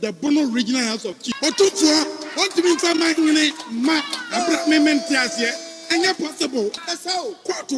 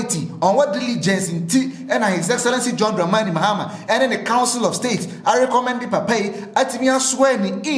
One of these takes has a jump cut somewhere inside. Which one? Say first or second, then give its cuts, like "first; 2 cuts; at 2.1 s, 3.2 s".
first; 2 cuts; at 1.3 s, 6.9 s